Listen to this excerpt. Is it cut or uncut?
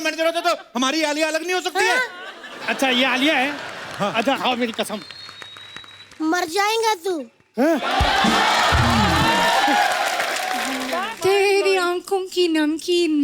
cut